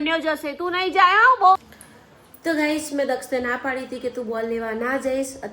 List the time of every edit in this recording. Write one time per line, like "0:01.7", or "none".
0:01.6